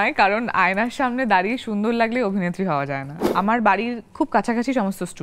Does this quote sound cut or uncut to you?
cut